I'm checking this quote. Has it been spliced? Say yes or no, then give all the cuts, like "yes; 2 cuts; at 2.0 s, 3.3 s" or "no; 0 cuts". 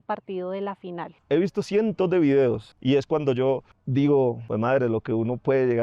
yes; 4 cuts; at 1.2 s, 2.7 s, 3.8 s, 4.4 s